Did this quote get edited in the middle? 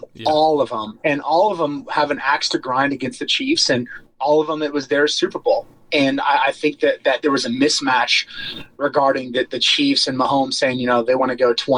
no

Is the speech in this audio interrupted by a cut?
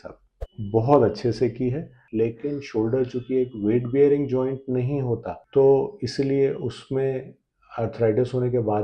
yes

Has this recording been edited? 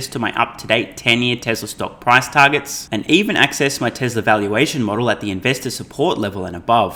no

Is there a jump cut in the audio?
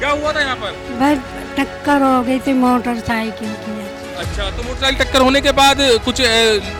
no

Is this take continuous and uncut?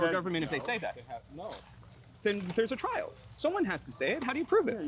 yes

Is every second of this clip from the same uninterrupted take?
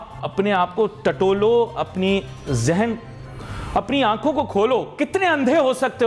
yes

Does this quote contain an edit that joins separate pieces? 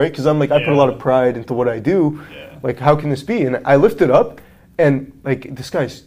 no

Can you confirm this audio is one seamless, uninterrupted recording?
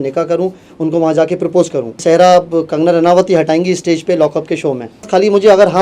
no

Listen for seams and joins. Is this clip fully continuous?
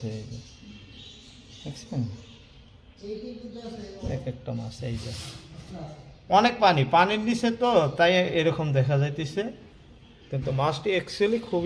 yes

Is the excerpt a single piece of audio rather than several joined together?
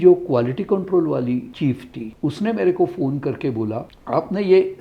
no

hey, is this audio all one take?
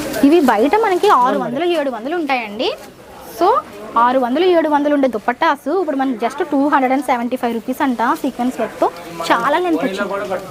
yes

